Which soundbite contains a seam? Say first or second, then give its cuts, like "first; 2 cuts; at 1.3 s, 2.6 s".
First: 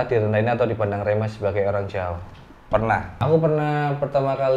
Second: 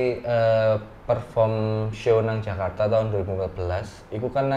first; 1 cut; at 3.2 s